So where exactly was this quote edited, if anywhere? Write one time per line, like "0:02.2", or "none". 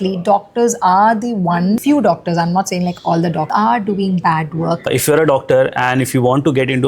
0:01.8
0:03.5
0:04.9